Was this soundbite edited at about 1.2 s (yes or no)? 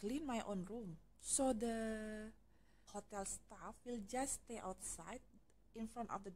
no